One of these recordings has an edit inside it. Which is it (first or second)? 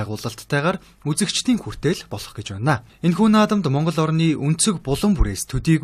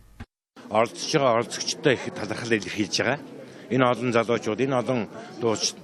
second